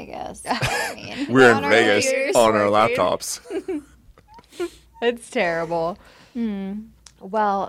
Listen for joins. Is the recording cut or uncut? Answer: uncut